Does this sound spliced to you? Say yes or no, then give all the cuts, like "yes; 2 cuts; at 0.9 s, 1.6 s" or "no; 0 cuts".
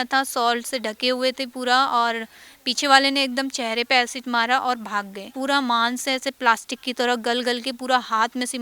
yes; 1 cut; at 5.3 s